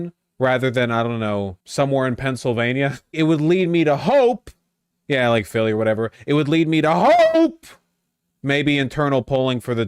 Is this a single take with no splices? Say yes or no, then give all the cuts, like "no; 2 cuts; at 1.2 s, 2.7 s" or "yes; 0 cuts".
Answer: no; 2 cuts; at 1.6 s, 3.1 s